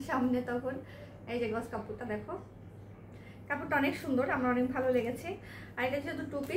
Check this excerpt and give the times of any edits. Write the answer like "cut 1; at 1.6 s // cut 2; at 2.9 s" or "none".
none